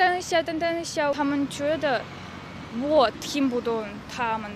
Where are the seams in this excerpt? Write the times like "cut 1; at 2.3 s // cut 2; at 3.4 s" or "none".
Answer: none